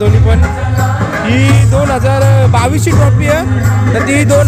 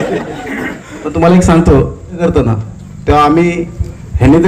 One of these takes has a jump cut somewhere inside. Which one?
second; 1 cut; at 2.2 s

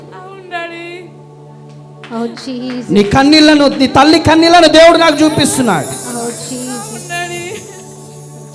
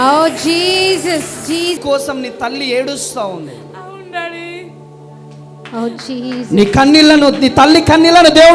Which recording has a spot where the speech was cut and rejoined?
second; 1 cut; at 1.8 s

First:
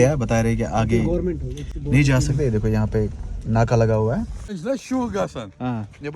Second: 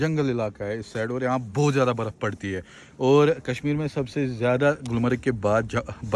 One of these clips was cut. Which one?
first; 1 cut; at 4.6 s

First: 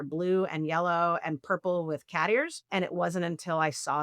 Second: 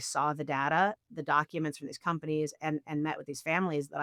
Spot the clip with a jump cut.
first; 1 cut; at 2.7 s

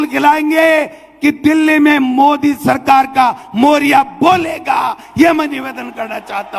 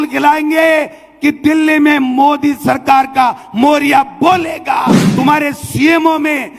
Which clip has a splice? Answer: second; 1 cut; at 5.0 s

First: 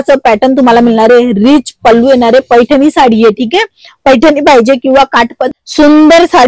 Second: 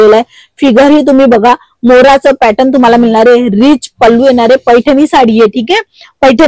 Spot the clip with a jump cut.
first; 1 cut; at 5.4 s

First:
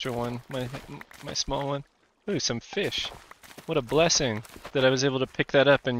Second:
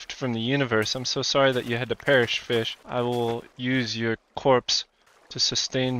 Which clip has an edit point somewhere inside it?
second; 2 cuts; at 2.8 s, 3.5 s

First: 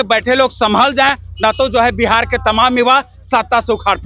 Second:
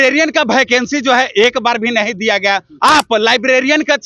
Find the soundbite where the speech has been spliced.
second; 1 cut; at 2.7 s

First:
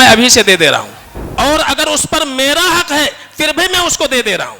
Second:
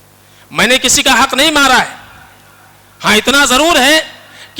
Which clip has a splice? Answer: first; 1 cut; at 1.2 s

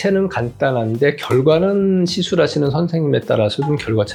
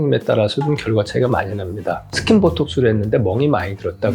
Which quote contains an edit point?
second; 1 cut; at 2.2 s

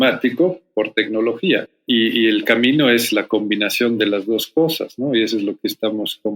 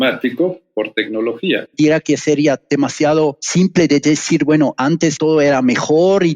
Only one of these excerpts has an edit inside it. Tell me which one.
second; 1 cut; at 1.7 s

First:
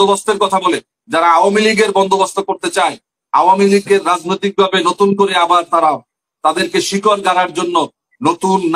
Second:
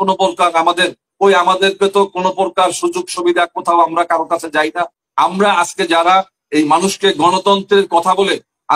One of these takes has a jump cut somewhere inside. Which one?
second; 1 cut; at 5.0 s

